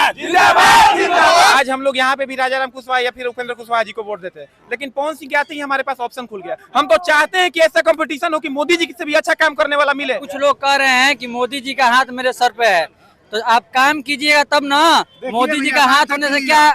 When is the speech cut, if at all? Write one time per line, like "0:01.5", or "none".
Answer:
0:01.5
0:10.3